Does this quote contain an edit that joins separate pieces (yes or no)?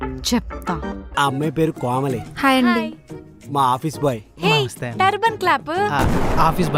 yes